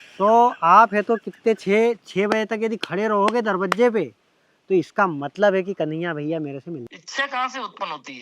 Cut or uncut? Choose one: cut